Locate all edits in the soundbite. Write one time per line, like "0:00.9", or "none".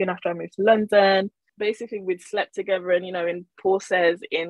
0:01.4